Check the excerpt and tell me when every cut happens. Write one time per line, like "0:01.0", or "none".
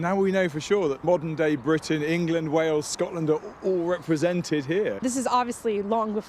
0:01.0
0:05.0